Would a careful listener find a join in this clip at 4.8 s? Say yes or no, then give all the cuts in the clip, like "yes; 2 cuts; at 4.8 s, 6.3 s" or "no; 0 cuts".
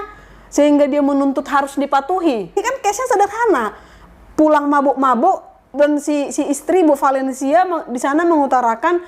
no; 1 cut; at 2.6 s